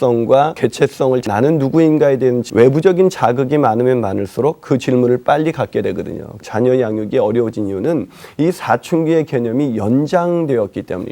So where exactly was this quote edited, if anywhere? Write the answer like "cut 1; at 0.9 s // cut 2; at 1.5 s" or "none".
cut 1; at 0.9 s // cut 2; at 2.4 s // cut 3; at 6.4 s